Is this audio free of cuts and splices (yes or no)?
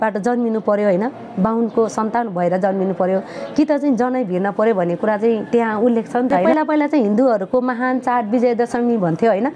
no